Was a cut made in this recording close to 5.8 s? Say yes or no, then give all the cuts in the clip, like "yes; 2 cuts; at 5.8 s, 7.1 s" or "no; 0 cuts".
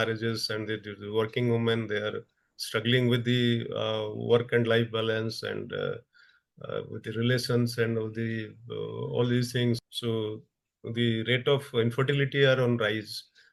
no; 0 cuts